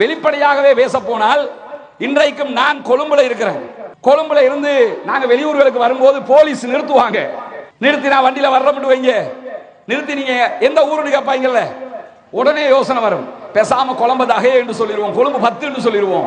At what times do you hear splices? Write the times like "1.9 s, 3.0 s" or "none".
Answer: none